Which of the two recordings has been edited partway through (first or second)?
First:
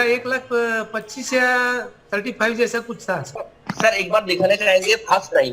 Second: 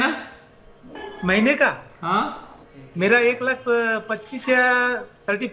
first